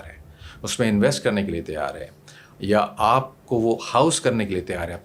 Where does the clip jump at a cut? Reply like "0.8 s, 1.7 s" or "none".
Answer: none